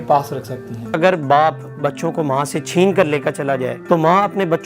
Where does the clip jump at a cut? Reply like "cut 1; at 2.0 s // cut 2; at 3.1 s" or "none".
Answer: cut 1; at 0.9 s // cut 2; at 3.7 s